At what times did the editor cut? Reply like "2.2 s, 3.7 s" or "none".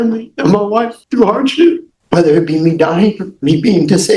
1.0 s, 1.9 s